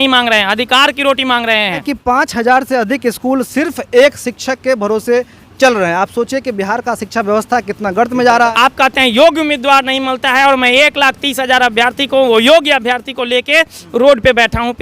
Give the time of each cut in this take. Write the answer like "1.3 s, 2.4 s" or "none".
1.9 s, 8.5 s